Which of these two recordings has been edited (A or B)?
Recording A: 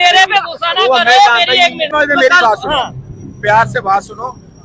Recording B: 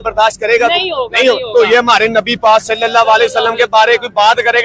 A